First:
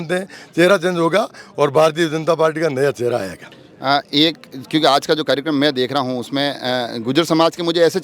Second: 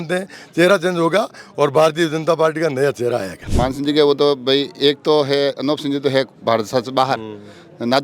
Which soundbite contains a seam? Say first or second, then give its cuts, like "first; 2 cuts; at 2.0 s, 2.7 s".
second; 1 cut; at 3.4 s